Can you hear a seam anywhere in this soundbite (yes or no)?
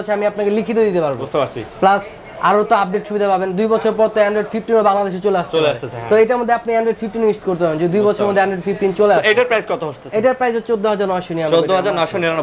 no